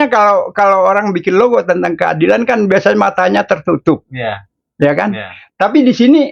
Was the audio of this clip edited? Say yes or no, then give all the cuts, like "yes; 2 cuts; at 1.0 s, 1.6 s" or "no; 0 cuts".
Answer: no; 0 cuts